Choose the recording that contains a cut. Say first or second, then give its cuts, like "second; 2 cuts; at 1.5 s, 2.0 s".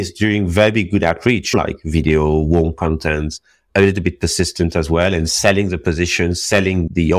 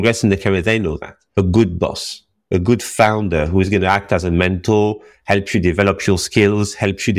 first; 1 cut; at 1.5 s